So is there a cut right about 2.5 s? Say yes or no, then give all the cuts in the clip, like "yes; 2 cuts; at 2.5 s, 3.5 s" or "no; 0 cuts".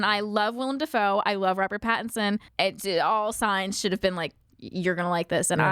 yes; 1 cut; at 2.5 s